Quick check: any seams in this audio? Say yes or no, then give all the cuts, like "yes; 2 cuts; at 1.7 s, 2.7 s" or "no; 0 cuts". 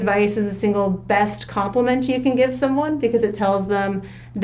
no; 0 cuts